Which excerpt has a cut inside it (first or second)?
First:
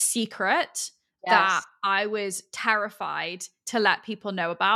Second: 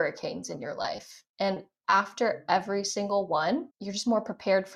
first